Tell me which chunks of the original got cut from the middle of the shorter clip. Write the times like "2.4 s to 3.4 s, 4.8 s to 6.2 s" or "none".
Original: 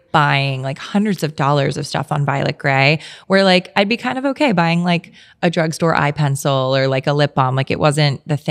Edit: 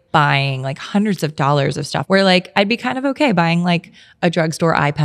2.0 s to 3.2 s